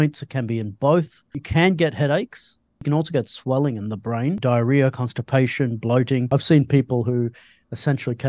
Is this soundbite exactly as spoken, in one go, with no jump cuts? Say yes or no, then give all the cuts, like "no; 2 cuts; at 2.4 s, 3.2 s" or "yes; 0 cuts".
no; 4 cuts; at 1.4 s, 2.8 s, 4.4 s, 6.3 s